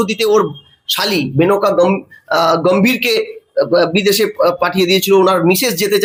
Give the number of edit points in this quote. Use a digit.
0